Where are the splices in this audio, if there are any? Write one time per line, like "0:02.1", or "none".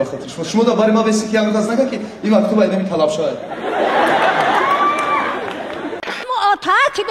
0:06.0